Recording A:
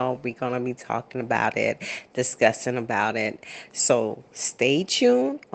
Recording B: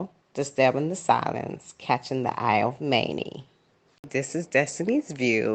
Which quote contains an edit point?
B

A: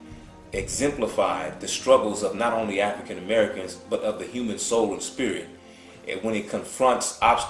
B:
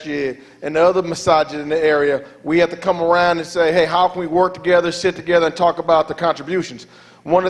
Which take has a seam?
A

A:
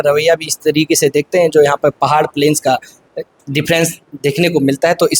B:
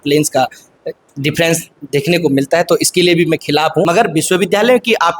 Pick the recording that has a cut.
B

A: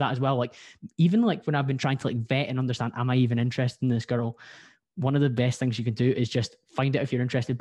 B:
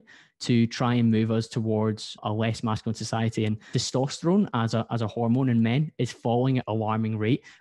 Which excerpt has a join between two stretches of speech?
B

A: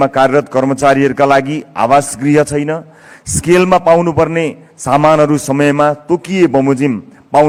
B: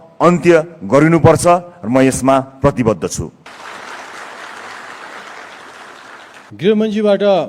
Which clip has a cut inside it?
B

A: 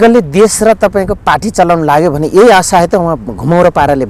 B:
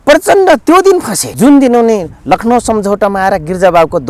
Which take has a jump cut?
B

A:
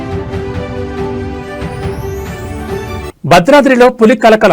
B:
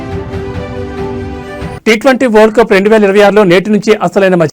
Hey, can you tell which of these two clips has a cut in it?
B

